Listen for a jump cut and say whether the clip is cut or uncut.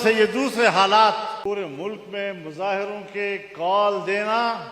cut